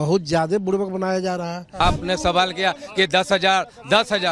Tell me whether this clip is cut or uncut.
cut